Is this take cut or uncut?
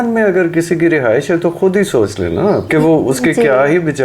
cut